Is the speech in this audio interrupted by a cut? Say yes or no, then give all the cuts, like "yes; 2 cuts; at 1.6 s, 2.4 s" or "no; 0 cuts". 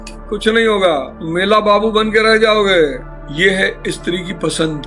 no; 0 cuts